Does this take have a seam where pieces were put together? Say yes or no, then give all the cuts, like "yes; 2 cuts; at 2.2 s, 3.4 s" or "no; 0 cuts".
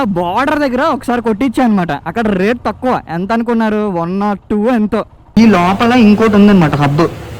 yes; 1 cut; at 5.3 s